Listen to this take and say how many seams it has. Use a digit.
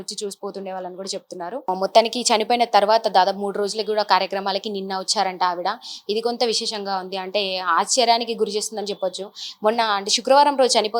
1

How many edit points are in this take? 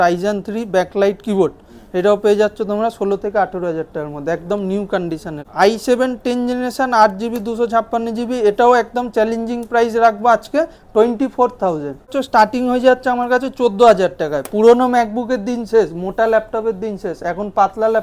2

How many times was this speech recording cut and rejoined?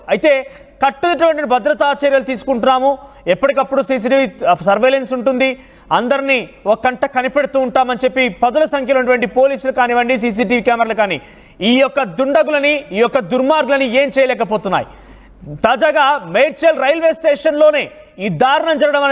1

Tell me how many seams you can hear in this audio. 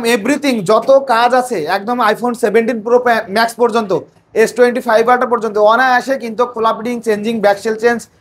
0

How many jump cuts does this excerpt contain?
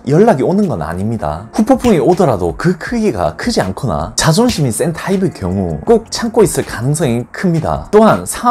0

